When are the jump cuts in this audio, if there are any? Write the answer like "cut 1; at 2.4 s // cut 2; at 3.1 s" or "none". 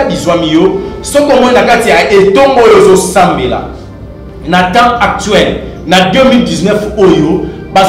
none